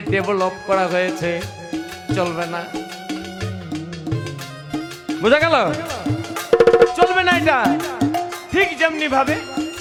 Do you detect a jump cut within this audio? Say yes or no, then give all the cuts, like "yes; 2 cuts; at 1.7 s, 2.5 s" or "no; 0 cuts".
no; 0 cuts